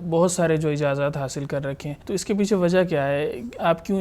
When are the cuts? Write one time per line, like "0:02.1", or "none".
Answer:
0:01.9